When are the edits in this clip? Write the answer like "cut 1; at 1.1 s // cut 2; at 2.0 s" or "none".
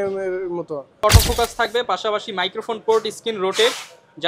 cut 1; at 1.0 s